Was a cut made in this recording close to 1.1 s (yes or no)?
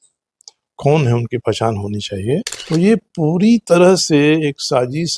no